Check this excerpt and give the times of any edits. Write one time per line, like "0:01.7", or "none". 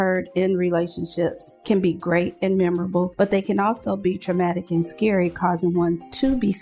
none